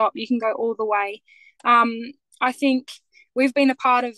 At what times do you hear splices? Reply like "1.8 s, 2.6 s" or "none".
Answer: none